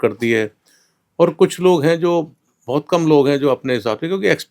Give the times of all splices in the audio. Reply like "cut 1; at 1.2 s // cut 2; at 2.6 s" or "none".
none